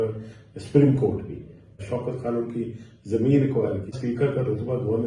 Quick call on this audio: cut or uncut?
cut